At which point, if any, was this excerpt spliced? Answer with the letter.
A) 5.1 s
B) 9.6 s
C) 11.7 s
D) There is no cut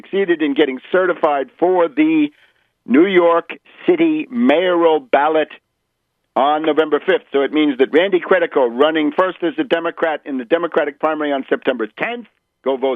C